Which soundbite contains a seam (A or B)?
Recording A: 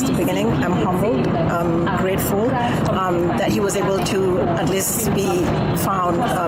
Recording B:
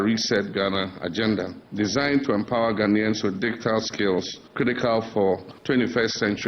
B